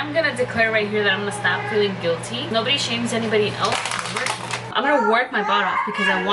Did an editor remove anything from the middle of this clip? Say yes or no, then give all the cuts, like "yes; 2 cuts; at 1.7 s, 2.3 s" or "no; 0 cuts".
yes; 2 cuts; at 2.5 s, 4.7 s